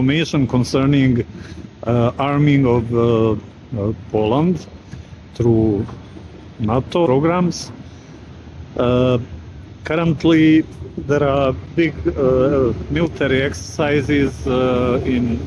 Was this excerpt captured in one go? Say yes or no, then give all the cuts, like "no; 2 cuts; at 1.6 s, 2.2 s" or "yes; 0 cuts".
yes; 0 cuts